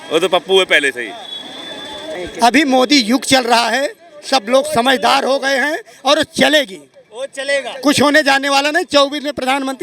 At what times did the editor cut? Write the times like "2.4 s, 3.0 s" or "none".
2.2 s